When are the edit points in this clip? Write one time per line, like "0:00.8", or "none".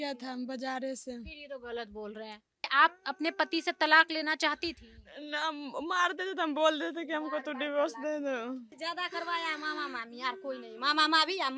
0:02.7
0:08.7